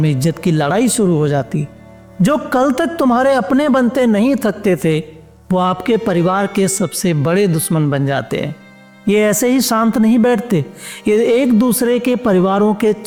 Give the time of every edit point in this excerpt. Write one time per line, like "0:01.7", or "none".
none